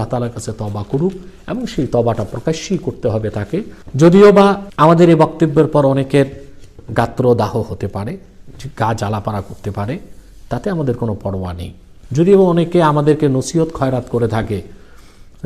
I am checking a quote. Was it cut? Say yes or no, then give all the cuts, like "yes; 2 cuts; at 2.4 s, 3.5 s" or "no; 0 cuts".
yes; 2 cuts; at 3.8 s, 4.7 s